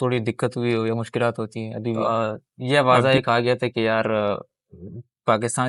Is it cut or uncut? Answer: cut